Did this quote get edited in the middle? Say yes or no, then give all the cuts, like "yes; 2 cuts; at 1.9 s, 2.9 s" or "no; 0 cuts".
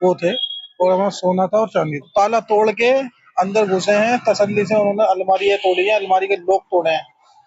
yes; 1 cut; at 2.1 s